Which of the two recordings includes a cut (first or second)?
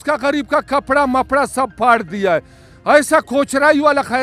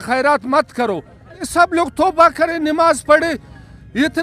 second